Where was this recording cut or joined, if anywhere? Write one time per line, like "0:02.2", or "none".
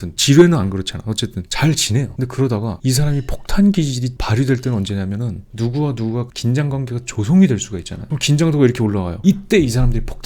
0:05.5